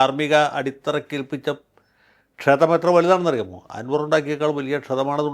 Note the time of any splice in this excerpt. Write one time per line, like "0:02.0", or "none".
none